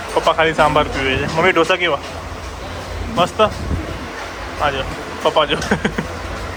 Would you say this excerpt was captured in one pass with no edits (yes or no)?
yes